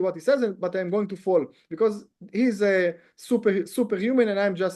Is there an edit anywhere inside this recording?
no; 0 cuts

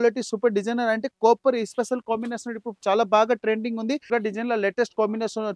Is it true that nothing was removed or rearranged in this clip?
no; 1 cut; at 4.1 s

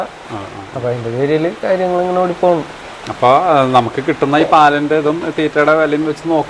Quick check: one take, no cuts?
yes; 0 cuts

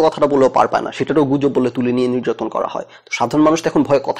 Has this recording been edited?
no; 0 cuts

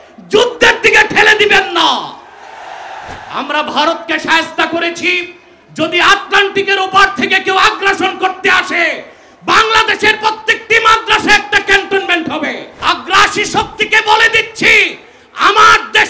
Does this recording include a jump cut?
yes; 1 cut; at 12.7 s

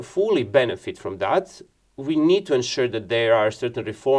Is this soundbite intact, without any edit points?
yes; 0 cuts

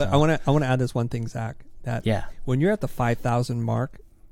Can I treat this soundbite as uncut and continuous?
yes; 0 cuts

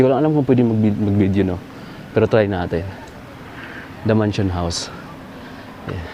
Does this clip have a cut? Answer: no; 0 cuts

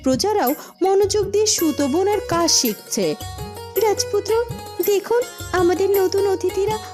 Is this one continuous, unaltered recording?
yes; 0 cuts

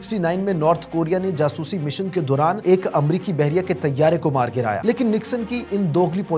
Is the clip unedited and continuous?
no; 1 cut; at 4.8 s

